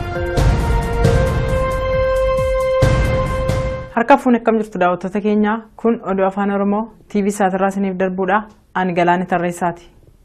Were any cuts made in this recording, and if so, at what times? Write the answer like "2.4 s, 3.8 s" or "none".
none